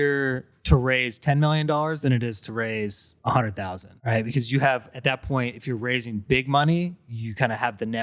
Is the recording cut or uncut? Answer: cut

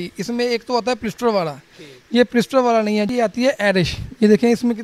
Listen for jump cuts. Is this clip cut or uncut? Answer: cut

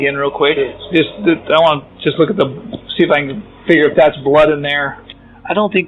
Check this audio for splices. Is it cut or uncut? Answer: uncut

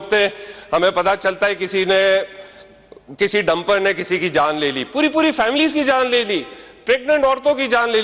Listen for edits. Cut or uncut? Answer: uncut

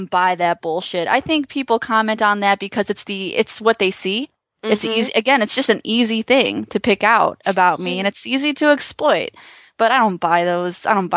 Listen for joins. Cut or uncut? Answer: uncut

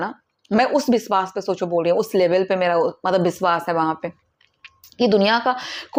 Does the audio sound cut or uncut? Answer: uncut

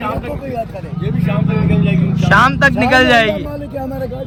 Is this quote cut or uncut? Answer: uncut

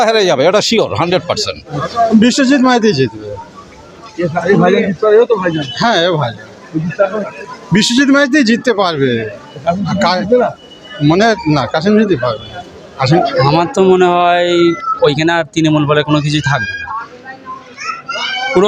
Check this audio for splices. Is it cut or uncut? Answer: cut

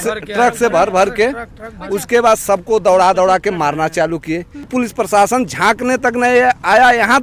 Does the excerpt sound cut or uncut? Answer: cut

